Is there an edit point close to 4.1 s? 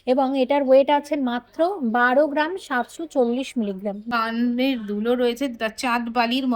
yes; 1 cut; at 4.1 s

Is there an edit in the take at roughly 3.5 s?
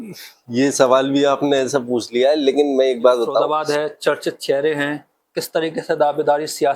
yes; 1 cut; at 3.5 s

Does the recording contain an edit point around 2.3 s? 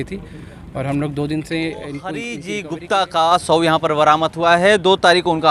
yes; 1 cut; at 2.3 s

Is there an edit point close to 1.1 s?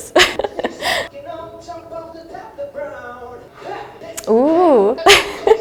no; 0 cuts

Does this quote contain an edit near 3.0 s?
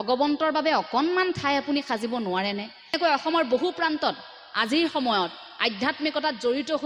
yes; 1 cut; at 3.0 s

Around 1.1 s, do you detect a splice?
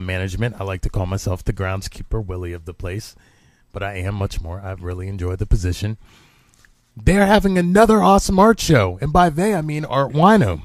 yes; 1 cut; at 1.1 s

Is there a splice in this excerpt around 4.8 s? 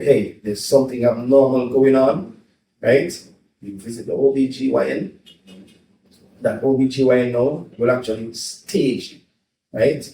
no; 0 cuts

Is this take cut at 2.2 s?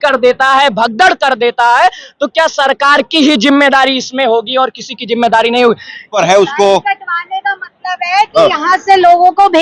no; 1 cut; at 6.1 s

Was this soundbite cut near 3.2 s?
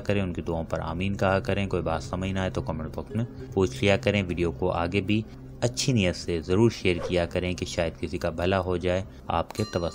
no; 0 cuts

